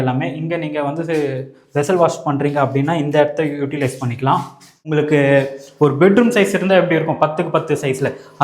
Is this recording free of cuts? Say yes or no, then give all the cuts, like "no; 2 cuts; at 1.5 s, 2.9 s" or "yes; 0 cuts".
no; 1 cut; at 4.8 s